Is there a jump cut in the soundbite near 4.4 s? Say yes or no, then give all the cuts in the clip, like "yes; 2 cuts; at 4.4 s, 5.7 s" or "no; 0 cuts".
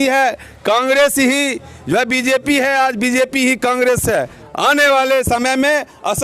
yes; 1 cut; at 4.4 s